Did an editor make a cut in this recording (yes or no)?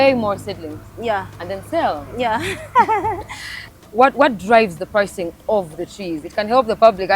yes